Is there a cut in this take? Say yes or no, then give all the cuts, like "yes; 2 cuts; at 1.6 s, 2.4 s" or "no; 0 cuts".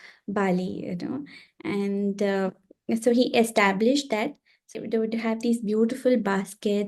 yes; 1 cut; at 4.7 s